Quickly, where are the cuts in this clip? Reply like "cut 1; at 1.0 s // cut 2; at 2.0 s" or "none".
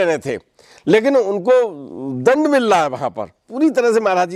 none